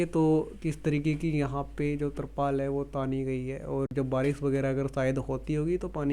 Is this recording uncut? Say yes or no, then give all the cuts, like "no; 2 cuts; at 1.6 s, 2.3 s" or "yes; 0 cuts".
yes; 0 cuts